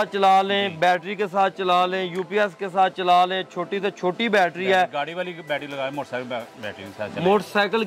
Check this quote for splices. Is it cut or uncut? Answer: uncut